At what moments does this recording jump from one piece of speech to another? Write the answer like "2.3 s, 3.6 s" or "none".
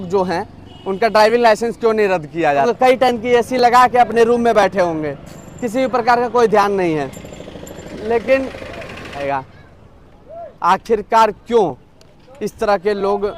2.6 s, 9.2 s